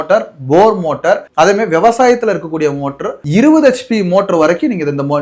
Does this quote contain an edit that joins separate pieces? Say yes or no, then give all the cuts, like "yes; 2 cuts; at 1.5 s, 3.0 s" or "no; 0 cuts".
yes; 1 cut; at 3.2 s